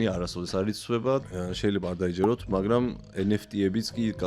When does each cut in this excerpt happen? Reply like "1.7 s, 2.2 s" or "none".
1.2 s